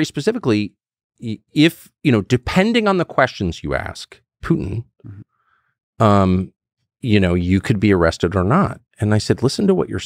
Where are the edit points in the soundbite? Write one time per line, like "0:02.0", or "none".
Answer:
none